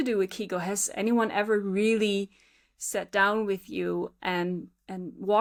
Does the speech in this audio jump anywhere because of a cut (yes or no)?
no